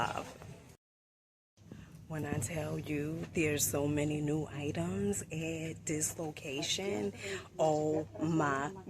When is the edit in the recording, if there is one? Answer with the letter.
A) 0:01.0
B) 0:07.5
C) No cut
A